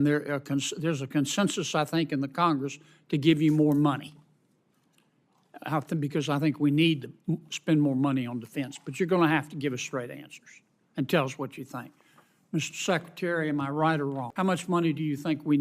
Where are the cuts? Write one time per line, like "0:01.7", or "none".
0:14.3

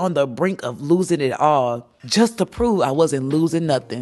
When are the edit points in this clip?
0:01.9

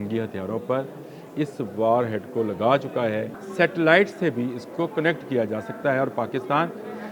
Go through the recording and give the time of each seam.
0:03.4

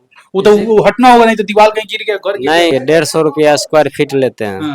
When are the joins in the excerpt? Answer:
0:02.7

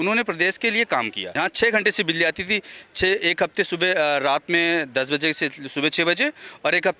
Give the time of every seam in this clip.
0:01.2

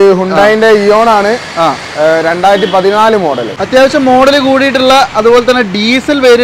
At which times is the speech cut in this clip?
0:03.5

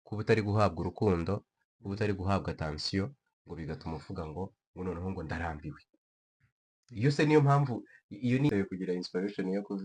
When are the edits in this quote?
0:08.5

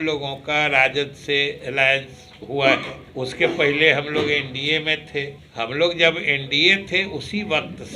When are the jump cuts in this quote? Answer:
0:03.0
0:05.4

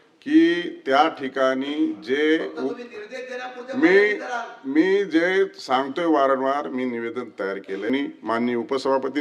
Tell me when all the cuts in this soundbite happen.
0:07.9

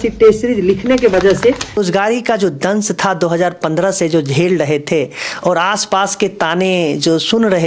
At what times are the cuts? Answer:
0:01.8

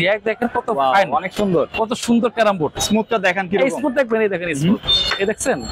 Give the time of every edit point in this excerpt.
0:02.8

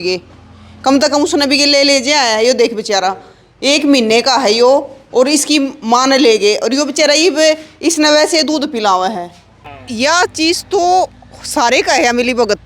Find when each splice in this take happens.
0:09.7

